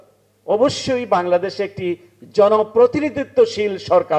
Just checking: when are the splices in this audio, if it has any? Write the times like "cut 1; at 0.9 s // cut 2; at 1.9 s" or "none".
none

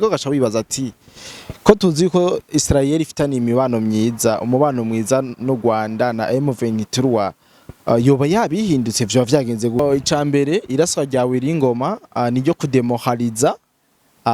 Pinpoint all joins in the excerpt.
cut 1; at 9.8 s

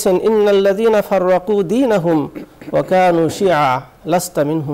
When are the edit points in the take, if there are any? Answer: none

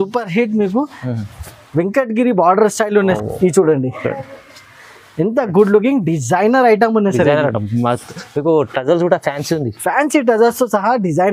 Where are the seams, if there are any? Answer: cut 1; at 3.2 s

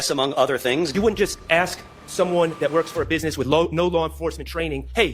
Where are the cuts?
cut 1; at 0.9 s

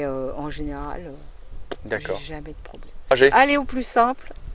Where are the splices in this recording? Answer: cut 1; at 3.2 s

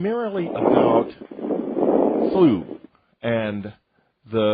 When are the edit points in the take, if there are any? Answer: cut 1; at 3.4 s

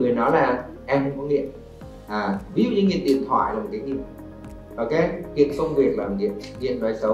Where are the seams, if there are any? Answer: none

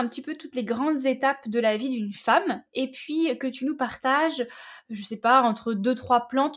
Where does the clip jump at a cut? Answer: none

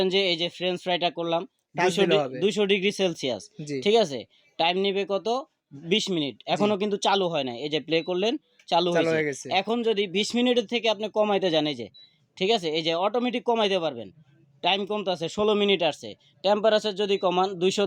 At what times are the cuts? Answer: none

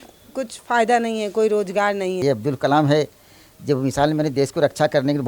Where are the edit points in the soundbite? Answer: cut 1; at 2.2 s

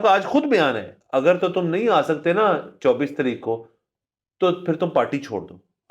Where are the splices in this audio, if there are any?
cut 1; at 0.9 s

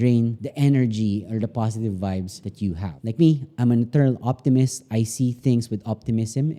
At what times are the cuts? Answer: cut 1; at 2.9 s

